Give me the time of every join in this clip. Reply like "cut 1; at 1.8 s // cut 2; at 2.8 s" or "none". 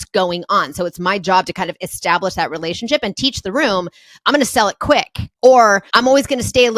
cut 1; at 5.2 s // cut 2; at 5.8 s